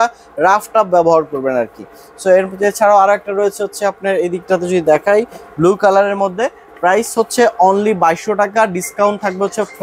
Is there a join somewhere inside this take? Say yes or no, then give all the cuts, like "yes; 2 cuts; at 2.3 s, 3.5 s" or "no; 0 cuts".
no; 0 cuts